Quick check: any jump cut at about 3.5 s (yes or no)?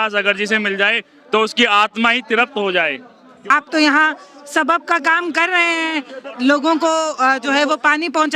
yes